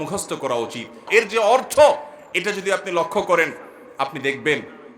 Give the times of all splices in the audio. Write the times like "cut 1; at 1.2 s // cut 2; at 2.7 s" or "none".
cut 1; at 1.1 s